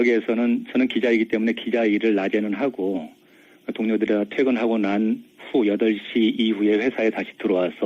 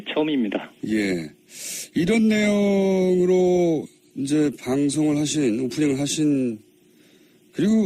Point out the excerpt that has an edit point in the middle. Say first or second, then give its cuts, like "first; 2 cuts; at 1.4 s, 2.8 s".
first; 1 cut; at 2.1 s